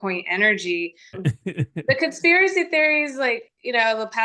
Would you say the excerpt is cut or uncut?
cut